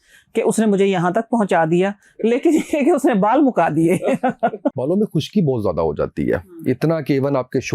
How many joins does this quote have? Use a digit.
1